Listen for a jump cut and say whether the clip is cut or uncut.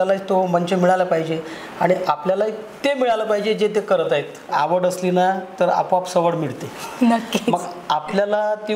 cut